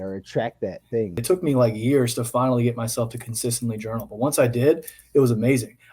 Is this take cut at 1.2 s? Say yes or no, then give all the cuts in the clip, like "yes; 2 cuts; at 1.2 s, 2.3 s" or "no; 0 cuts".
yes; 1 cut; at 1.2 s